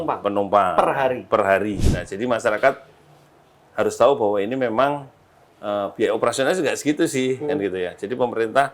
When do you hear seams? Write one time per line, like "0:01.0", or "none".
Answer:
0:01.8